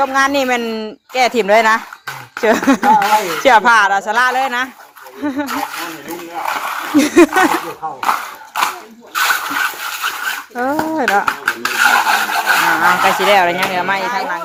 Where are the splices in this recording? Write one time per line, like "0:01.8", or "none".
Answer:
none